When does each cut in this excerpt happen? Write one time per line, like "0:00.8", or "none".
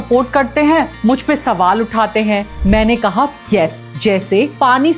0:02.5
0:03.8

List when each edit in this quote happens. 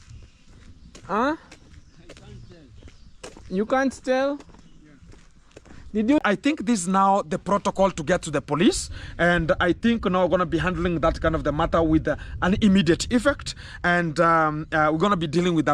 0:06.2

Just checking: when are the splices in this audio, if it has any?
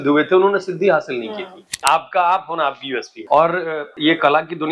0:01.8
0:03.1
0:03.9

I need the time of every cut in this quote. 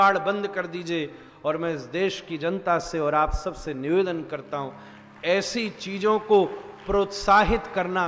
none

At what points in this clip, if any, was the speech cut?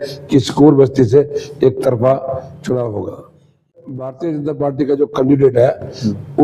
0:04.1

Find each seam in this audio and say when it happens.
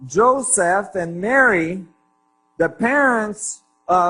0:01.2

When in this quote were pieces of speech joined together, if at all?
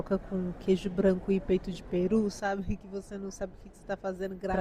none

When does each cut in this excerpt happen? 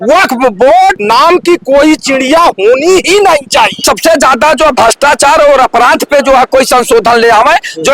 0:01.0
0:03.8

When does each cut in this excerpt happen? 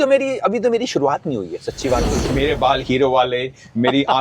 0:02.2

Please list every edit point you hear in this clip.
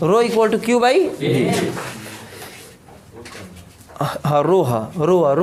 none

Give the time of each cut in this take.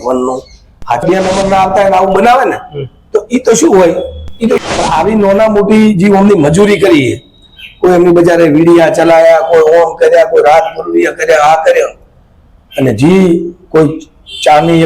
0:01.0
0:04.6

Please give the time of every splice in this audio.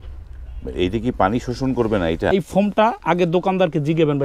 0:02.3

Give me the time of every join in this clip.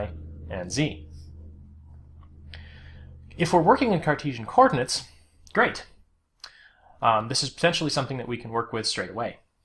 none

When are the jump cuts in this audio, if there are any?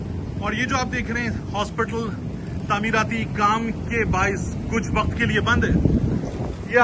none

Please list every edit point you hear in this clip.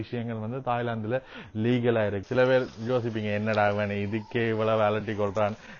0:02.2

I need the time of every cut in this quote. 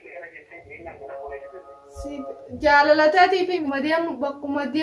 0:03.6

